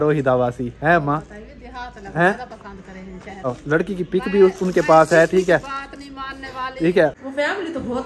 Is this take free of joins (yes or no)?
no